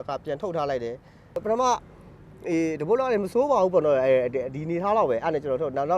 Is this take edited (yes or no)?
yes